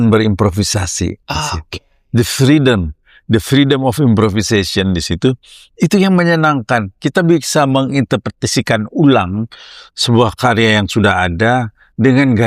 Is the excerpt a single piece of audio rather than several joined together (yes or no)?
yes